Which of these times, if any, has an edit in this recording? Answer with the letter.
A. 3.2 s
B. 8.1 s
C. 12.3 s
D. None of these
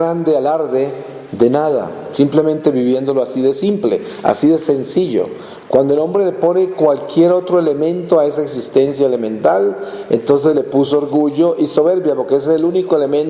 A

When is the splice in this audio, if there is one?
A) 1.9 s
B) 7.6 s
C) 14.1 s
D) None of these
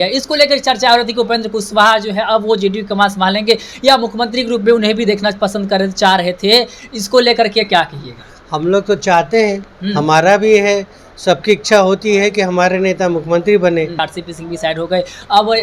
C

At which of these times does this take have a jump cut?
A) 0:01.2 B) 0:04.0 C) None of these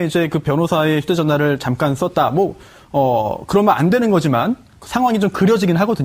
B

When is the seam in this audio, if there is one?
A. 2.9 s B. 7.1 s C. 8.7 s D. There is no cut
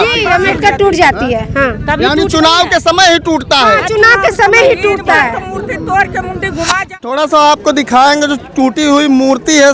B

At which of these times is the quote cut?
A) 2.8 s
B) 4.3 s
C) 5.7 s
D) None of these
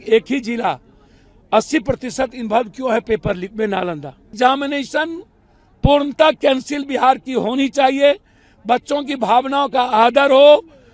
B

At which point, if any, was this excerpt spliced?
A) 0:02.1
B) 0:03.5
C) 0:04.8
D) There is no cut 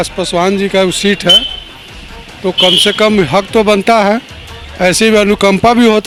D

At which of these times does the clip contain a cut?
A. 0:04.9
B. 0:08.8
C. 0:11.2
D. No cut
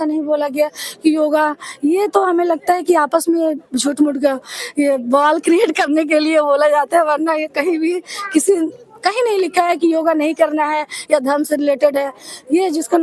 D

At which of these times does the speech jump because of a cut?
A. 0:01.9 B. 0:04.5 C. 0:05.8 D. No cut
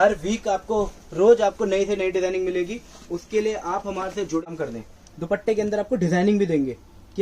B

